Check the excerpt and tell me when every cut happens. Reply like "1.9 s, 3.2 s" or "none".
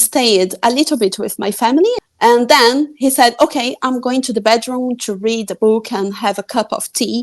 2.0 s